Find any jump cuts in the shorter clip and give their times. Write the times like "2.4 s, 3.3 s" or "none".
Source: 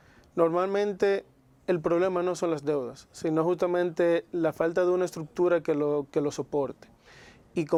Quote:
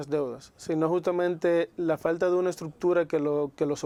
none